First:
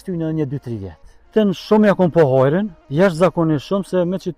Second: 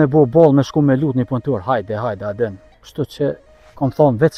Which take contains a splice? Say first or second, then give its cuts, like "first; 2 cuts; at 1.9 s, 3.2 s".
first; 2 cuts; at 1.3 s, 2.8 s